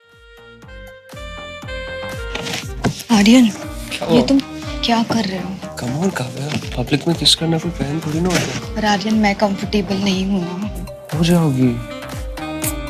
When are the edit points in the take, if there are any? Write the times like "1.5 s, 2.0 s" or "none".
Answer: 1.5 s, 2.0 s